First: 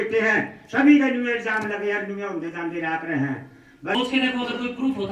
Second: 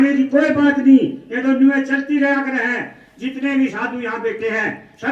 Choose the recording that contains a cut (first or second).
first